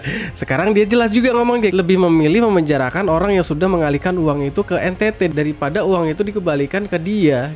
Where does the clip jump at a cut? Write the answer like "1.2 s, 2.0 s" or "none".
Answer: 1.7 s